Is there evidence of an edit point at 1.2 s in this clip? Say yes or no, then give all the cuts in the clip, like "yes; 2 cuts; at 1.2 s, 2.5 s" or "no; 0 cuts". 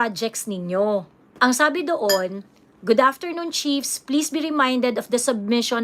yes; 1 cut; at 1.2 s